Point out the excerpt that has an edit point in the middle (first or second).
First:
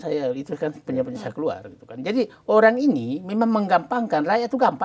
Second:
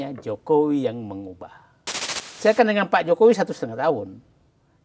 second